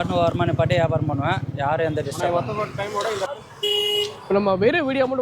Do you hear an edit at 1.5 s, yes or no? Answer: no